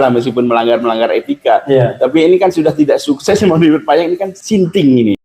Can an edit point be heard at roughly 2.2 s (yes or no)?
no